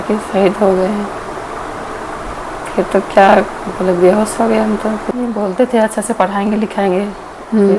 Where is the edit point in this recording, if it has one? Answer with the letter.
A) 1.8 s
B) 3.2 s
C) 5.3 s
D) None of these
C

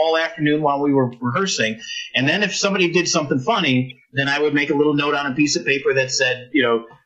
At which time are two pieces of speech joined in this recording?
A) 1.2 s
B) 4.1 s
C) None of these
C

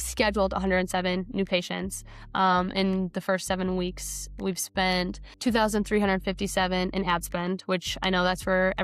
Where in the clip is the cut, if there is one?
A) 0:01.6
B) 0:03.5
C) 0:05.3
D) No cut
C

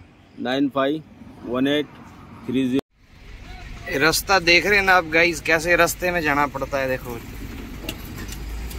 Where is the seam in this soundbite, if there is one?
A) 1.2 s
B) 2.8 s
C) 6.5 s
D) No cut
B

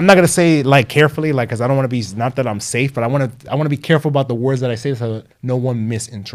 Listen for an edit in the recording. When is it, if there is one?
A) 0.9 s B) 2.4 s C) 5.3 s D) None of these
C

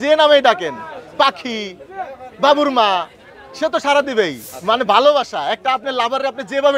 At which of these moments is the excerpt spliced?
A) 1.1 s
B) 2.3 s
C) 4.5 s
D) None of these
C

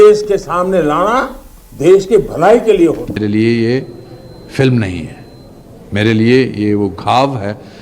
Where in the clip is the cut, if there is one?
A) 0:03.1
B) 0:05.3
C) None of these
A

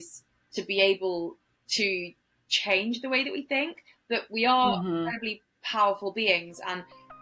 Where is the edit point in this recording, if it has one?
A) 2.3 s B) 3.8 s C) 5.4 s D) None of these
D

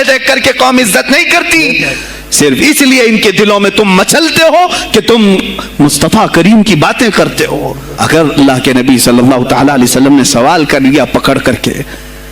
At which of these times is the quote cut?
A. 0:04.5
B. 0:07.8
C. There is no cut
B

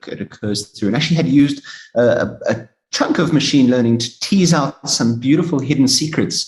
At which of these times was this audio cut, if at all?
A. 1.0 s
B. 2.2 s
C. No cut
C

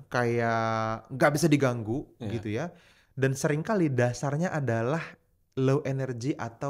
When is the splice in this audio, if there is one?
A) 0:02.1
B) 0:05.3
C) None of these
C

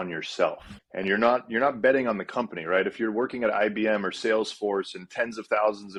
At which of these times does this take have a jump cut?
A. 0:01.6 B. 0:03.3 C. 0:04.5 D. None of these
D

